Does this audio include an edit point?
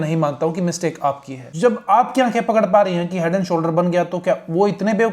yes; 1 cut; at 1.4 s

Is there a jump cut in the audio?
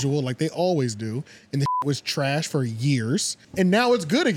yes; 1 cut; at 3.4 s

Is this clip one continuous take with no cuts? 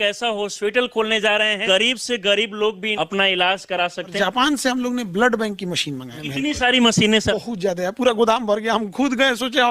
no; 5 cuts; at 1.6 s, 2.9 s, 4.1 s, 6.2 s, 7.3 s

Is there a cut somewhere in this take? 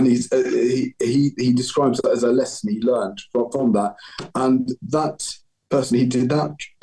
no; 0 cuts

